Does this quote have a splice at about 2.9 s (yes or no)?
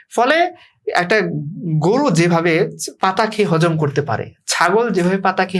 no